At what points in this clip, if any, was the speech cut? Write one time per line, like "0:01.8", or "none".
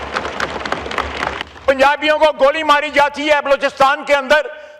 0:01.4